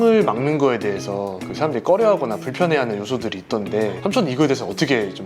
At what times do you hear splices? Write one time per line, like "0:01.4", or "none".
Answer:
none